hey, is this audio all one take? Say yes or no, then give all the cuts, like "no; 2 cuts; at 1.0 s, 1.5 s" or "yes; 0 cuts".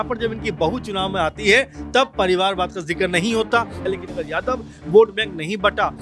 no; 1 cut; at 3.8 s